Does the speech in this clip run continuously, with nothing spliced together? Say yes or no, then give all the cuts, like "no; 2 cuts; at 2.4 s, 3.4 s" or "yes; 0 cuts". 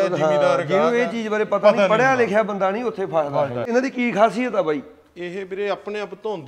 no; 1 cut; at 3.7 s